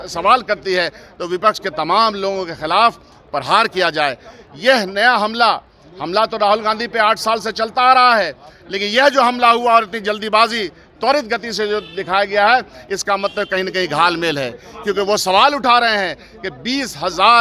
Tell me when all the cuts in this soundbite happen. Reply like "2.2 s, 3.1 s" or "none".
none

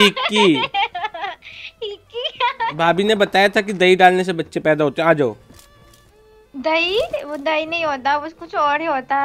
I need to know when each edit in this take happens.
2.7 s

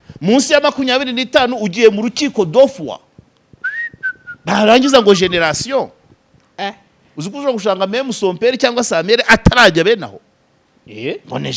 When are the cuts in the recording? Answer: none

